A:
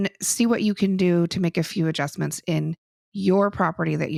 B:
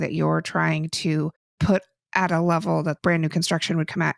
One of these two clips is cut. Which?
B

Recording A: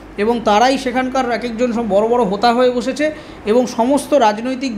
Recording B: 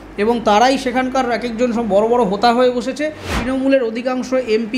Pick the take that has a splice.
B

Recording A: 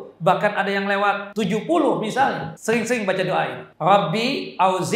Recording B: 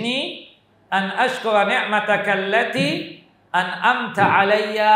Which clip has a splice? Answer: A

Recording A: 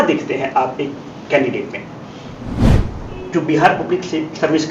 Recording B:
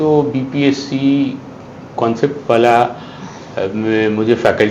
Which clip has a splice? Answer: A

